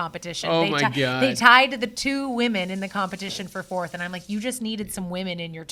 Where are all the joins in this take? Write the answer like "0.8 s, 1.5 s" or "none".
none